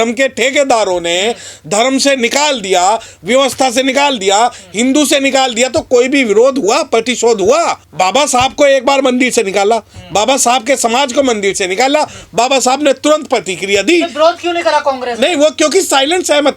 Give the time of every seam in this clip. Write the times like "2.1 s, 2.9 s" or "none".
none